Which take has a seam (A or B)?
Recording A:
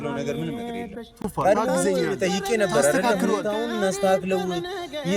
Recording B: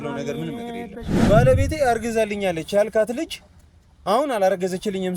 B